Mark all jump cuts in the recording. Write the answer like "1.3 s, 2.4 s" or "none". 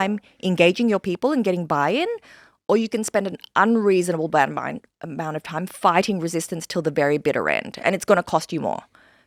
none